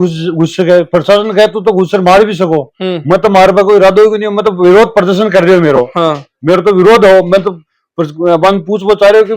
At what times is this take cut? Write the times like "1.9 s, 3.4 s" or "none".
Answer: none